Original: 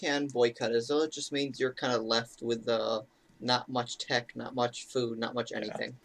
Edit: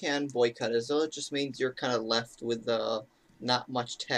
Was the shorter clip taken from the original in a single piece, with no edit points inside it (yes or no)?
yes